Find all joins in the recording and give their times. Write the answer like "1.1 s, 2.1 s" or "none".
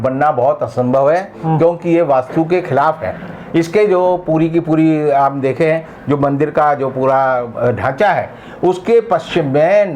none

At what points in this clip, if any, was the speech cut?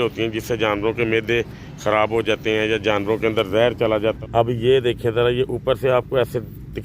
4.2 s

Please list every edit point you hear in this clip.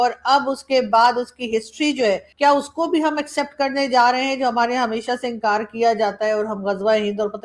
none

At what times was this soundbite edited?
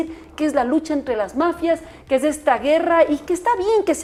none

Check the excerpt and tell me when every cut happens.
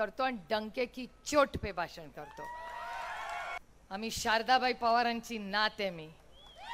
3.6 s

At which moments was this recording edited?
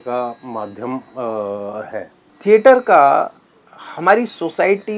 2.2 s

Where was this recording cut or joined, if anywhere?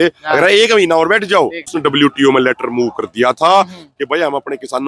1.7 s

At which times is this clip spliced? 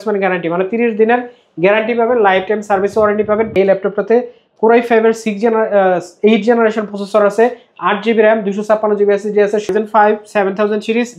3.5 s, 9.7 s

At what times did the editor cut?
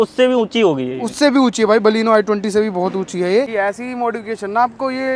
3.5 s

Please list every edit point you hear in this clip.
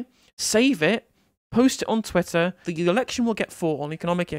2.7 s

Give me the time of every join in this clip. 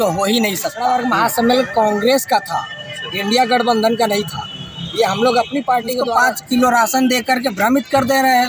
0.9 s, 6.0 s

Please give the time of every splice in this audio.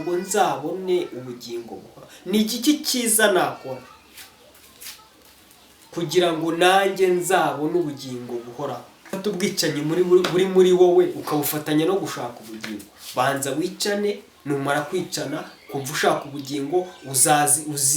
9.2 s

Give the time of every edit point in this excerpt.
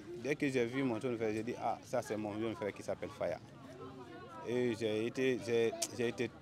none

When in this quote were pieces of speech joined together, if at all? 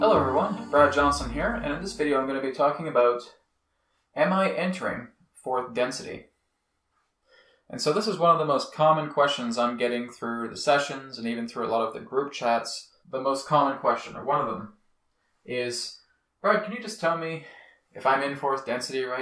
none

